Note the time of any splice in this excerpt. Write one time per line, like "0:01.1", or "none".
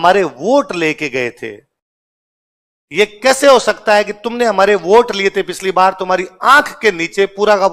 none